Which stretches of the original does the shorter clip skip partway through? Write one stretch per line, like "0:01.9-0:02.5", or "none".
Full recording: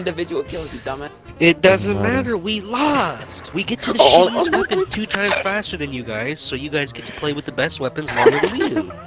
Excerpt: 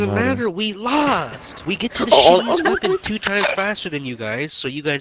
none

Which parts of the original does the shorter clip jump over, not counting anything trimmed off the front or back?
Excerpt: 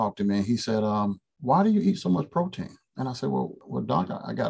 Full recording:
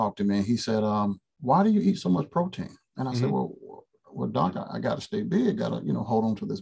0:03.6-0:04.1

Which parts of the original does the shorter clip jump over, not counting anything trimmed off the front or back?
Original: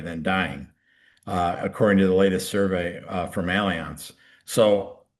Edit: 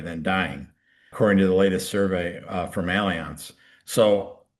0:01.1-0:01.7

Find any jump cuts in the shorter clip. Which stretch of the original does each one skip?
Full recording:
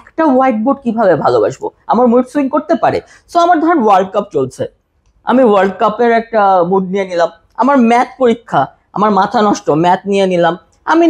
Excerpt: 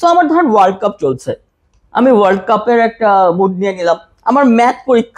none

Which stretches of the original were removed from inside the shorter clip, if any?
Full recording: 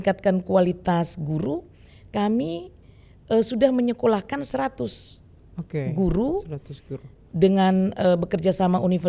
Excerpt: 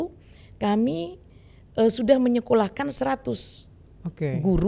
none

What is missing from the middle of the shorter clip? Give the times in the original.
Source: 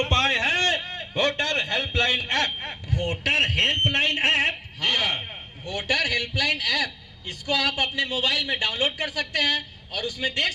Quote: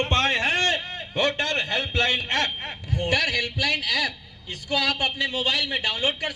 0:03.1-0:05.9

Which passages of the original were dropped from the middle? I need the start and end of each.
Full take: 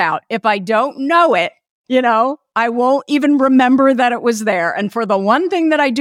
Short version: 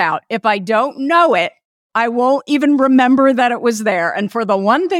0:01.8-0:02.4

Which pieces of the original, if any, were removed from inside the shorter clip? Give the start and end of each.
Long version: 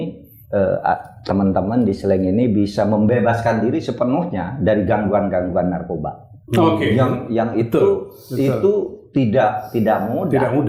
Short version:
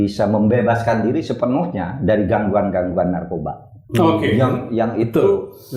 none

